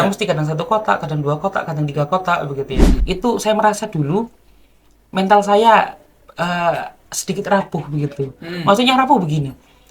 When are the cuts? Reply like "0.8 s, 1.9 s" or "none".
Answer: 2.9 s